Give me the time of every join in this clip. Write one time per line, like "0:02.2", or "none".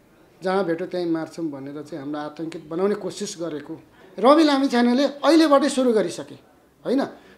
0:04.0